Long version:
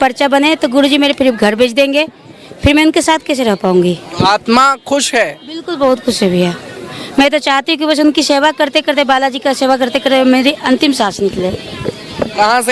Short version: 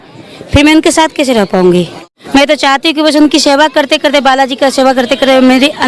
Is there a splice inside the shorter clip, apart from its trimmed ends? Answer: yes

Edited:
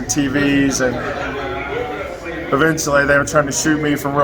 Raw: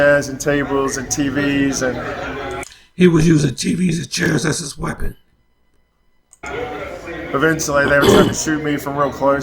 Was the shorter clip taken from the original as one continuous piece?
no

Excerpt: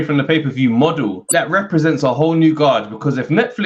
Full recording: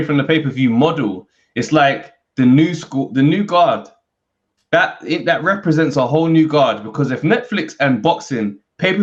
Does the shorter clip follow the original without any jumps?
no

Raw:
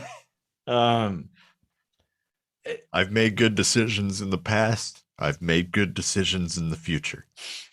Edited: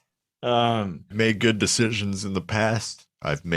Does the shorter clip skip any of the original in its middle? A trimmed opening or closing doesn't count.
yes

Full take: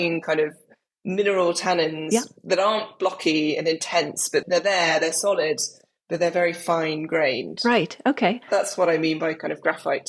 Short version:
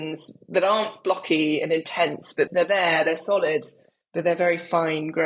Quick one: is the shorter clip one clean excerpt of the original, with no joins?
yes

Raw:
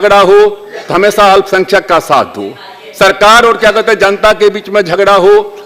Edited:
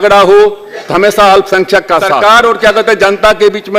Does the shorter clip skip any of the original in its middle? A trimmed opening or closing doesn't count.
yes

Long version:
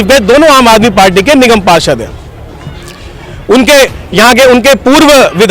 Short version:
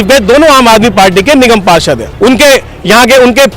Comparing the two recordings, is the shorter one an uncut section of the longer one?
no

